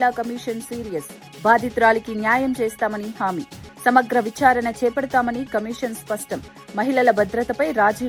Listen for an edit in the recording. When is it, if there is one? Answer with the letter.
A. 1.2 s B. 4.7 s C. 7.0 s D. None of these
D